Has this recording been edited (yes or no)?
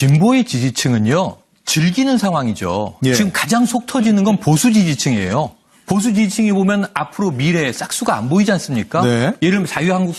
no